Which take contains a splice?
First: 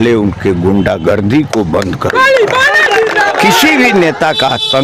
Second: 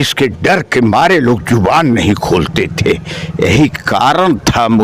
first; 1 cut; at 3.6 s

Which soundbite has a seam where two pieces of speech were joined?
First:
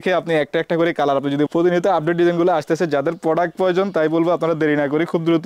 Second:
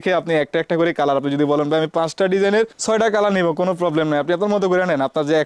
first; 1 cut; at 1.5 s

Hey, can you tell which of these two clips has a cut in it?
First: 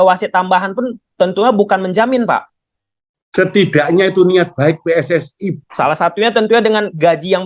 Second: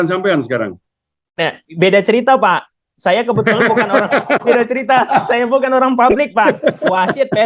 first; 1 cut; at 5.6 s

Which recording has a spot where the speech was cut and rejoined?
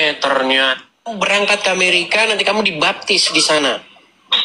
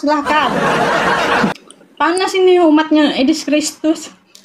second; 1 cut; at 1.5 s

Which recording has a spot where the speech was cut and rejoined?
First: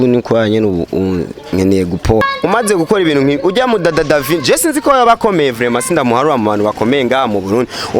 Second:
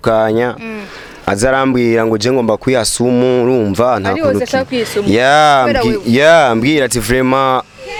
first; 1 cut; at 2.2 s

